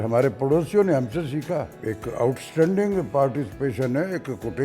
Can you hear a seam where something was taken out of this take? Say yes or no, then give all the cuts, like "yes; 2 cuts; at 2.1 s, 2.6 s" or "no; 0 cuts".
yes; 1 cut; at 1.8 s